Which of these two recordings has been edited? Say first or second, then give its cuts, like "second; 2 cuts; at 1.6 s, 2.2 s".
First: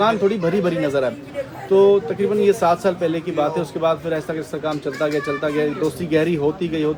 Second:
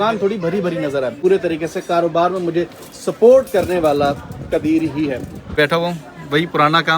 second; 2 cuts; at 1.2 s, 5.4 s